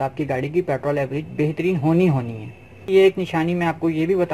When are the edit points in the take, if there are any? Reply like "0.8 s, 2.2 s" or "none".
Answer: 2.9 s